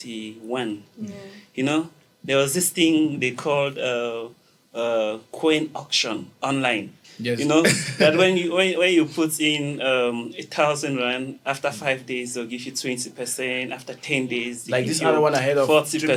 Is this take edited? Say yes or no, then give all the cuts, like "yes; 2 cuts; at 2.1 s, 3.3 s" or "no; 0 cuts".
no; 0 cuts